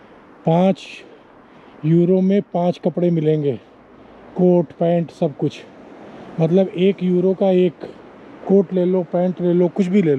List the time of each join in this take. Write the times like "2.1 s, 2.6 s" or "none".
none